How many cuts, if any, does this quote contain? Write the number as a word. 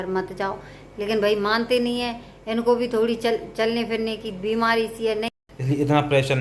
one